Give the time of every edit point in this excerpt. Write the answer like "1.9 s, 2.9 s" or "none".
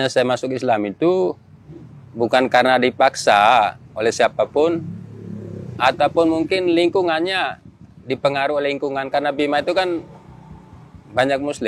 none